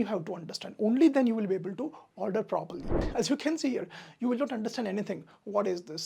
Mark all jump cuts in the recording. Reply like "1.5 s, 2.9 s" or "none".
3.0 s